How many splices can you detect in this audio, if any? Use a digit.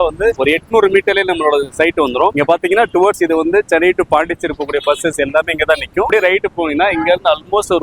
2